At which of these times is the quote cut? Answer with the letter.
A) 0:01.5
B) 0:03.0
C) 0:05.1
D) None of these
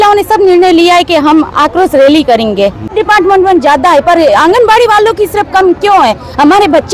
B